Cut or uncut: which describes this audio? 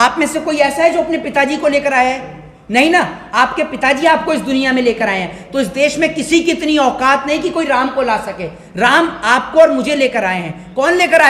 uncut